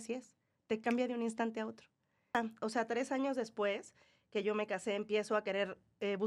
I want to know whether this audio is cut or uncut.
cut